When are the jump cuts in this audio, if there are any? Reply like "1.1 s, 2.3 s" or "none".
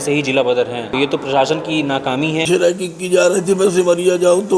0.9 s, 2.4 s